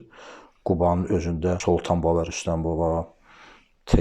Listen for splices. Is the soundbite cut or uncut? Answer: cut